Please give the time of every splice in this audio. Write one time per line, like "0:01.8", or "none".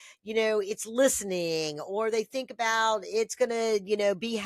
none